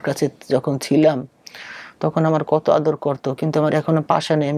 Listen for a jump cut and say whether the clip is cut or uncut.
uncut